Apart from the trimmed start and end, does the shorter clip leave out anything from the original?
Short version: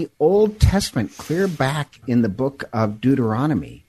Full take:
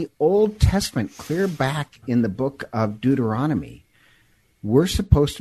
no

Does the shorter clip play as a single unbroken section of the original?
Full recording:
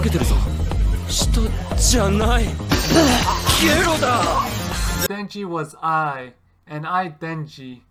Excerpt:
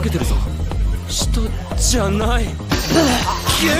yes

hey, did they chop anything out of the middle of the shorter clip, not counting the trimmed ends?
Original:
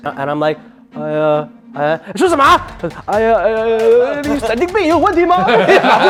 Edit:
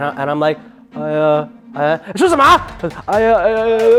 no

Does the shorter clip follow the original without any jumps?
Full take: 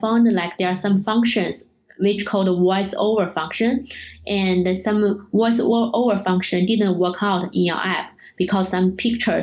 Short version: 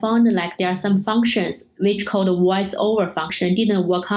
no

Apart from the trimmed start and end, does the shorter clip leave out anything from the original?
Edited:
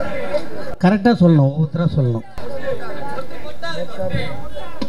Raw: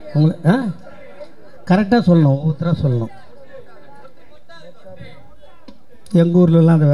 no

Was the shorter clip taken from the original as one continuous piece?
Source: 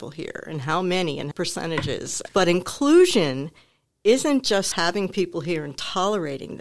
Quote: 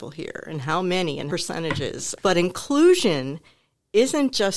no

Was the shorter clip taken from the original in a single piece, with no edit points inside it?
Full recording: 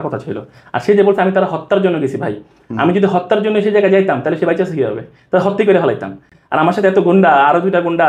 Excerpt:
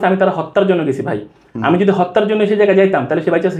yes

